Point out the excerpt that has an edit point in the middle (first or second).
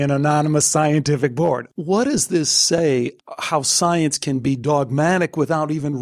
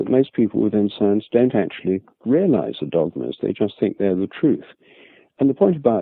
first